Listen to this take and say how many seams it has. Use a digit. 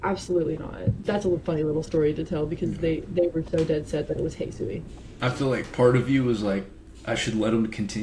1